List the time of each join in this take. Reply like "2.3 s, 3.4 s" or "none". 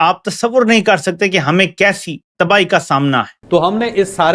3.3 s